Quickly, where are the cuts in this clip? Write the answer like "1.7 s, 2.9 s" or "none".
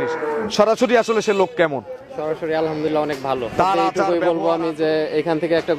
4.0 s

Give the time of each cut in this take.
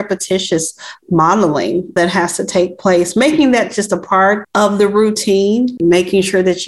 4.5 s, 5.8 s

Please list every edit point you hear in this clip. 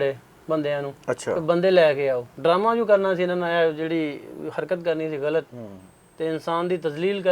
2.3 s

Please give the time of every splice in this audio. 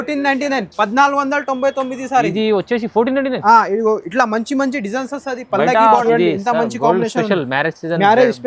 6.0 s

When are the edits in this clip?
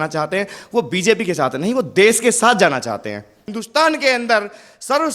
3.4 s

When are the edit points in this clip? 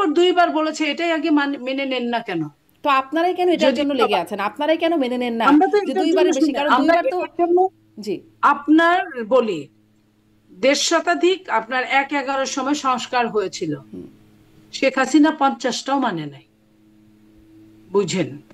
none

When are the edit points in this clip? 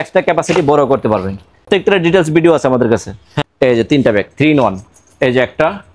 1.7 s, 3.3 s

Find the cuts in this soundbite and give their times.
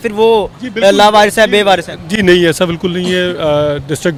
none

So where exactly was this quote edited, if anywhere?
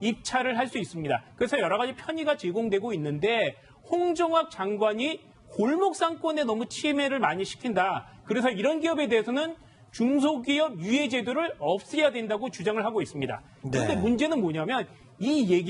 4.2 s

